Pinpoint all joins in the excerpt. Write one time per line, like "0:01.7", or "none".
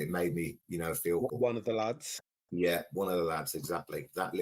0:01.3